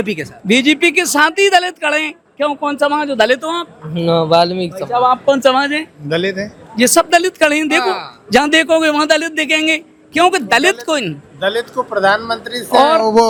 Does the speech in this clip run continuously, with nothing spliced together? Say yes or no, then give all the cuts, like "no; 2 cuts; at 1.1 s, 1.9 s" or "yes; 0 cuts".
yes; 0 cuts